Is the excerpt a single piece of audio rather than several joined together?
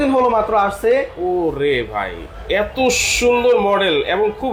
yes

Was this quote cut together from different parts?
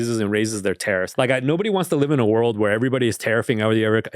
yes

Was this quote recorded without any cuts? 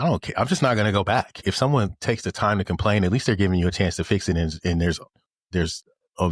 no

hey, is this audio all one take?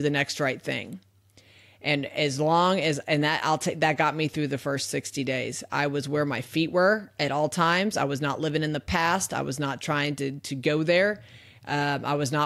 yes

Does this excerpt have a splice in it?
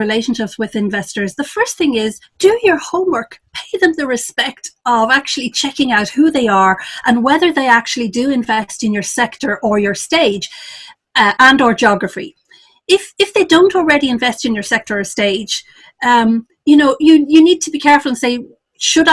no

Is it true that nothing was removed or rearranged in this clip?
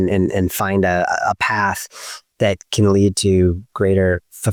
yes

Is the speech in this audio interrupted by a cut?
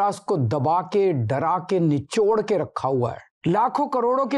yes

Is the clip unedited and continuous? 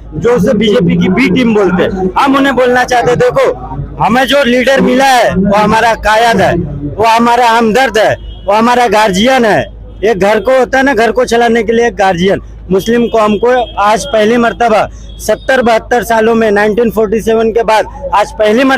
yes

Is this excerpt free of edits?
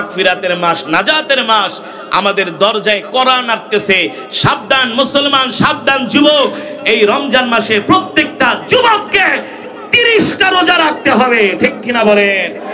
yes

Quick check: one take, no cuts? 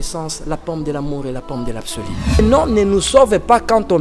no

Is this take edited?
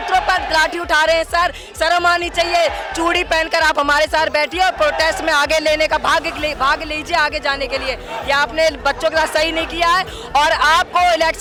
no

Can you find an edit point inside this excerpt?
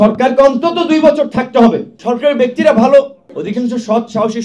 yes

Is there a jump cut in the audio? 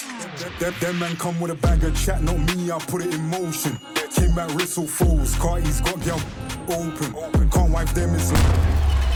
no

